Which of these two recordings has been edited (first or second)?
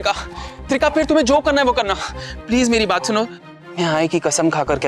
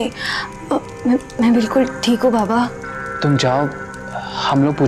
first